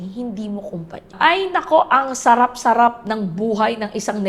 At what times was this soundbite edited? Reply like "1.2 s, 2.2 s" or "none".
1.1 s